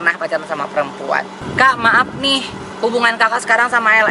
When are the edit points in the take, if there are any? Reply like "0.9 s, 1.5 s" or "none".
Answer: 1.4 s